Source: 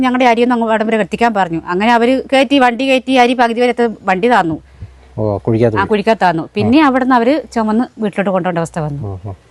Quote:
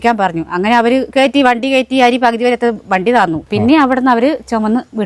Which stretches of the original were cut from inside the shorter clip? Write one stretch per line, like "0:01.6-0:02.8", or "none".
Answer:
0:04.6-0:06.5